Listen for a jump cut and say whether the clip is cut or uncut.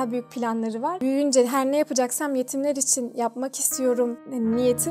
cut